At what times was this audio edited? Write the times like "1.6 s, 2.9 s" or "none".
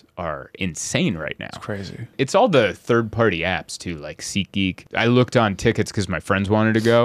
2.1 s, 4.8 s